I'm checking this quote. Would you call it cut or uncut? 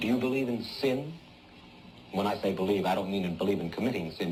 uncut